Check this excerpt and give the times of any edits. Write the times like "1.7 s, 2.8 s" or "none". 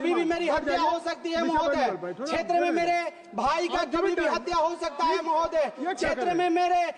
none